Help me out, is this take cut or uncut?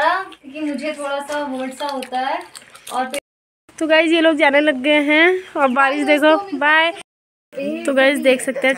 cut